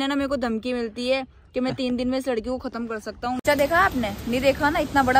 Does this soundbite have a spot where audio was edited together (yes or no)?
yes